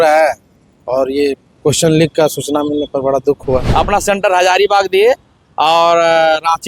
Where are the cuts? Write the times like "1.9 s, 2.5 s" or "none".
3.7 s